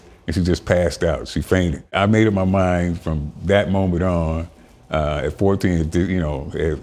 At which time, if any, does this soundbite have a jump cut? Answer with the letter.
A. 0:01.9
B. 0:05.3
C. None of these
A